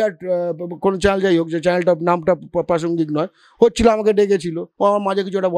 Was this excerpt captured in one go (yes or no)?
yes